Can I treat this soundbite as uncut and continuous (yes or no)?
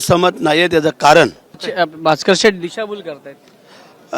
no